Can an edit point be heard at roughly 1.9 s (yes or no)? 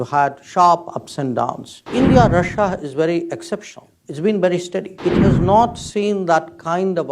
yes